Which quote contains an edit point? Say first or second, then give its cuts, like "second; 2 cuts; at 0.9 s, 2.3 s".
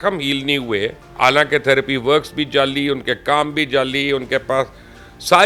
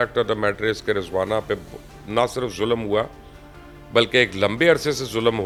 first; 1 cut; at 1.1 s